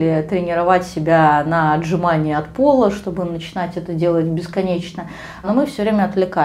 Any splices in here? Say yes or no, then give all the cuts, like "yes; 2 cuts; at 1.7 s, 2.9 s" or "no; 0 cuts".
no; 0 cuts